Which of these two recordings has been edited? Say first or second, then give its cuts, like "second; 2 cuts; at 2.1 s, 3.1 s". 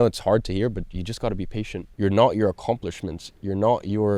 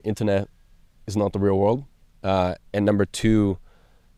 first; 1 cut; at 1.8 s